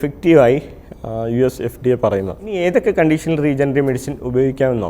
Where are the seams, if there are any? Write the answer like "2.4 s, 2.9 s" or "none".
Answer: 2.5 s